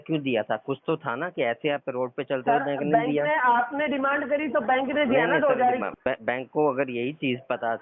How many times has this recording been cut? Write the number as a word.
one